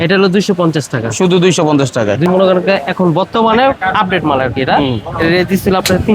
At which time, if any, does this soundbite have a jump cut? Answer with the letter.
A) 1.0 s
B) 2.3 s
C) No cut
B